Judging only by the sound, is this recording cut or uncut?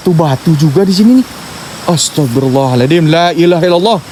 uncut